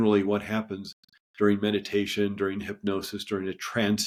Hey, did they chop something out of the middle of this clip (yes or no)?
no